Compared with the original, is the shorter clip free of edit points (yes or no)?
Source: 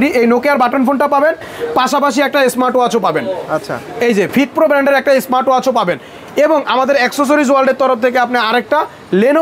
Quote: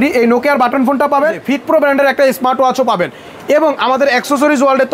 no